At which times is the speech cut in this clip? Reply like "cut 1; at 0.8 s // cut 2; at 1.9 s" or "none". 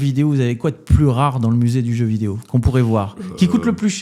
none